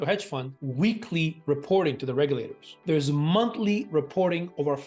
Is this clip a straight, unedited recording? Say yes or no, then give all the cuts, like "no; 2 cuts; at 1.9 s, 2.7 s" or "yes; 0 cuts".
no; 1 cut; at 2.7 s